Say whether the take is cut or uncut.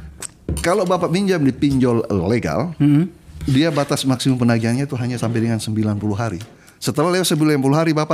uncut